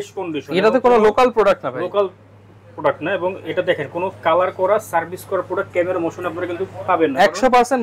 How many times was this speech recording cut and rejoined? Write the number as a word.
zero